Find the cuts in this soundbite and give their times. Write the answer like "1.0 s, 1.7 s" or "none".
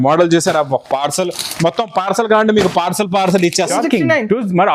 3.7 s